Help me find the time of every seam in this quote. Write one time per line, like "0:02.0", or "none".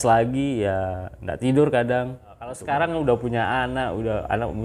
0:02.6